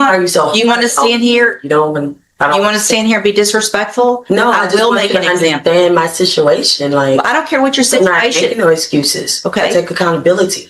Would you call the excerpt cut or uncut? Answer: uncut